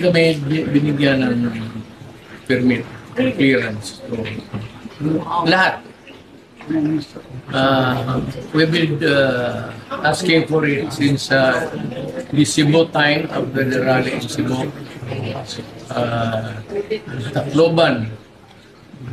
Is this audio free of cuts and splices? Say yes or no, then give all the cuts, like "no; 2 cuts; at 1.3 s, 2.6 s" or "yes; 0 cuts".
yes; 0 cuts